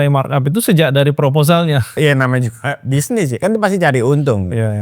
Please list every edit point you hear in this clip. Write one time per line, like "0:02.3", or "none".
0:02.0